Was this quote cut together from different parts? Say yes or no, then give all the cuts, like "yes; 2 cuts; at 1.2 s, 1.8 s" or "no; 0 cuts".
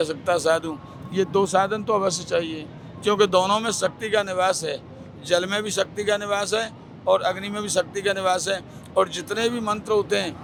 no; 0 cuts